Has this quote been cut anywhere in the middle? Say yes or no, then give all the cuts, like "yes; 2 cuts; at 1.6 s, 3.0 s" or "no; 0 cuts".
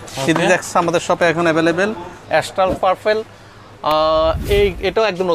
yes; 1 cut; at 2.1 s